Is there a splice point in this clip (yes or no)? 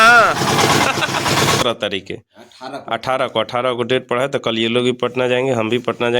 yes